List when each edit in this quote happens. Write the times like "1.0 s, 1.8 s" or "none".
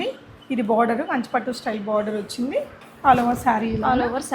2.8 s